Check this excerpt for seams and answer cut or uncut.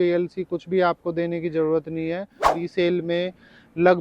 cut